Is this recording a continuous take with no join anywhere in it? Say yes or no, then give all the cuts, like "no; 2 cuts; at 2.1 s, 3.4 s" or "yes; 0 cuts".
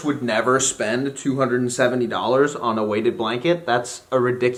yes; 0 cuts